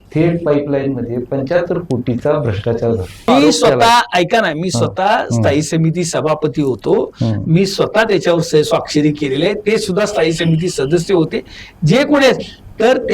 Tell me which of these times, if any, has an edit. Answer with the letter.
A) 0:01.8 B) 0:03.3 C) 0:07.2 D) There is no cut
B